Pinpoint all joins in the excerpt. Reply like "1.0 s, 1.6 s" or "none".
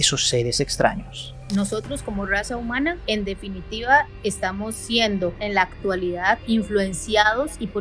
1.4 s, 3.0 s, 6.4 s